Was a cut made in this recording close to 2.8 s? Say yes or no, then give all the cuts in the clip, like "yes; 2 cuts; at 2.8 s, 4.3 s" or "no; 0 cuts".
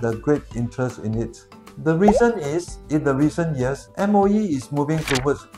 no; 1 cut; at 1.5 s